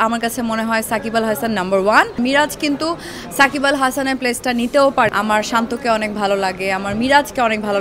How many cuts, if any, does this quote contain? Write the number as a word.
two